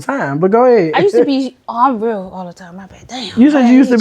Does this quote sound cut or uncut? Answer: uncut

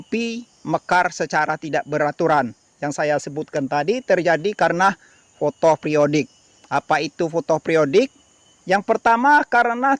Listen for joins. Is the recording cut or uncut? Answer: uncut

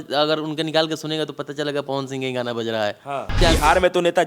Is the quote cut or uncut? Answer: cut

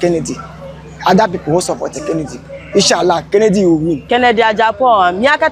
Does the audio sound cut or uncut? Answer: cut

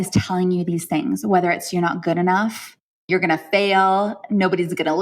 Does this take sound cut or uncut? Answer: cut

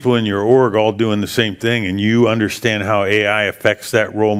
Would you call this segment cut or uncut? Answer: uncut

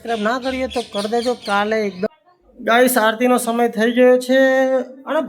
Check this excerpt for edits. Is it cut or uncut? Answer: cut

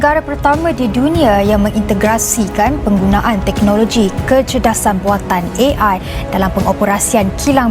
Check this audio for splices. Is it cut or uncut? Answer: uncut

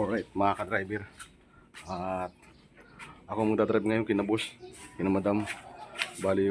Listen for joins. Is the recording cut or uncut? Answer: uncut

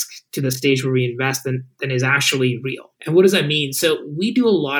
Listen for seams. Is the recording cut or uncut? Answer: cut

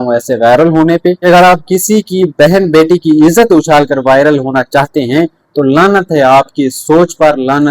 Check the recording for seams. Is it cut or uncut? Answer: cut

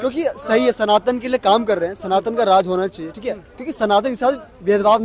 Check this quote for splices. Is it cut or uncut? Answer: uncut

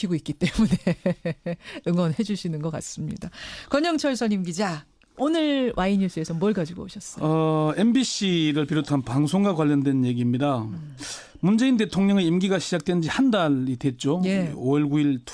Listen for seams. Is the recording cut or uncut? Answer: uncut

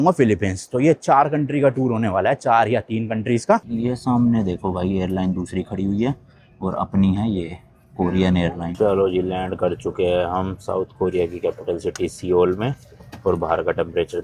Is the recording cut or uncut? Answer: cut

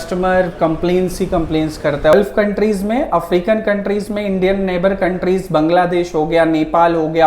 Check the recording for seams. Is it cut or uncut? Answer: cut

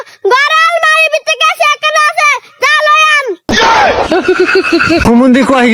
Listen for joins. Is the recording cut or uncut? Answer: uncut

